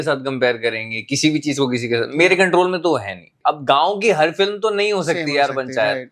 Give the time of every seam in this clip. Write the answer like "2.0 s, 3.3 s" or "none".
3.3 s